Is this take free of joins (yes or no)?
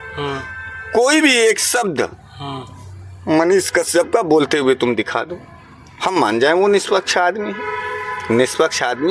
yes